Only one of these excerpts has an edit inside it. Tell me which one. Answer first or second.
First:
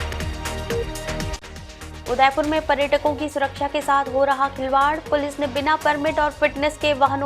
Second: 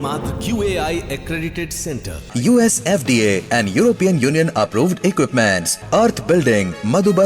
first